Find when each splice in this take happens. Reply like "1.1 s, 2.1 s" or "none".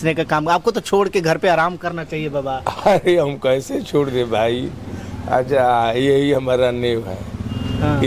none